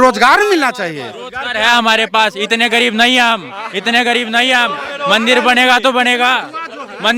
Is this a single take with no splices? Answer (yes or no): yes